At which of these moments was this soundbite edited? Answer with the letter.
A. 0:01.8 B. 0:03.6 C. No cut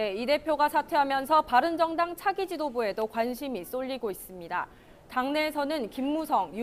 A